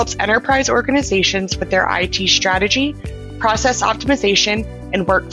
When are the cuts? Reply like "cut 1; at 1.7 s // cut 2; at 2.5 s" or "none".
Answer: none